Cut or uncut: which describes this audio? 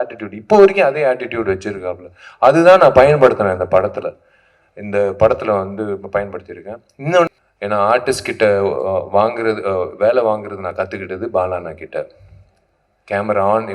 cut